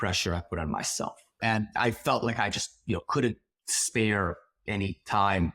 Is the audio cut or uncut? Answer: cut